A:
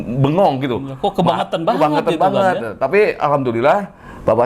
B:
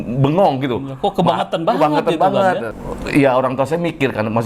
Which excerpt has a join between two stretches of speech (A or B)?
B